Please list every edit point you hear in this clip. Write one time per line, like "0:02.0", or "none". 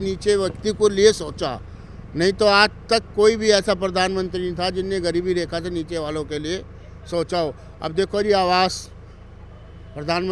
none